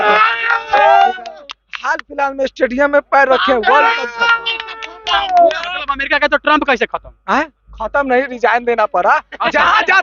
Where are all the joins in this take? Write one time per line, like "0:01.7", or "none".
none